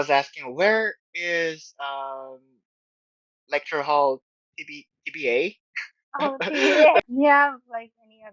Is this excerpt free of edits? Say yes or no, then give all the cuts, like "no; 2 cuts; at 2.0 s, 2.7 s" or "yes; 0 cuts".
no; 1 cut; at 7.1 s